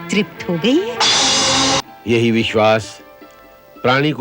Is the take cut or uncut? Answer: cut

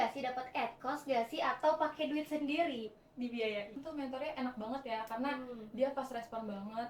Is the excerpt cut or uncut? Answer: cut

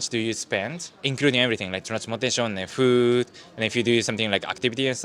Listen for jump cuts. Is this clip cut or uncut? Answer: uncut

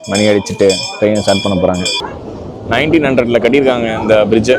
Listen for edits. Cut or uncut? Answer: cut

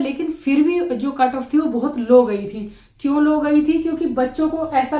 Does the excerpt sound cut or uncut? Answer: uncut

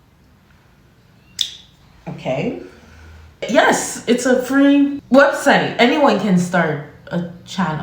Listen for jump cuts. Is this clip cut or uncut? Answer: cut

